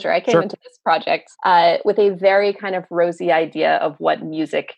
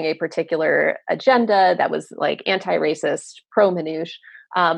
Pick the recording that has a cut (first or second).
first